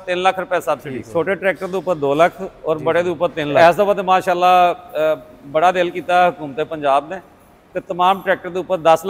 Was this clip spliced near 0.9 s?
yes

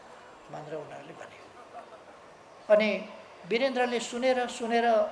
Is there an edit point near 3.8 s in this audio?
no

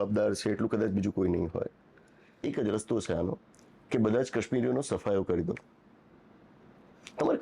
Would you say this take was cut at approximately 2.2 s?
yes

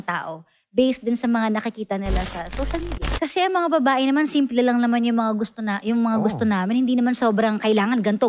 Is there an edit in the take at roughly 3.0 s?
yes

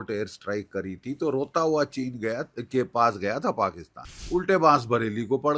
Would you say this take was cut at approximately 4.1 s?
yes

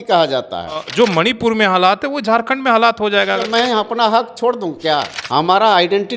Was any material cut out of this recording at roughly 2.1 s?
no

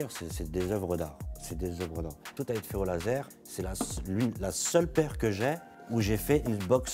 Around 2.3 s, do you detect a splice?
yes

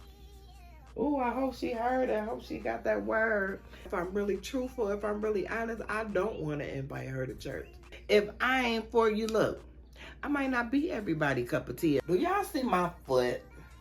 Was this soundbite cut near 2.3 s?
no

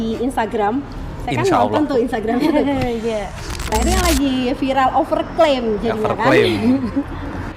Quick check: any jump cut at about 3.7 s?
yes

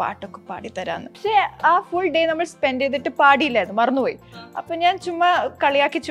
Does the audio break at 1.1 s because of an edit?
yes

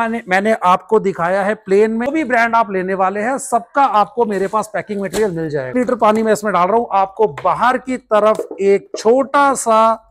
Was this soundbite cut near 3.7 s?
no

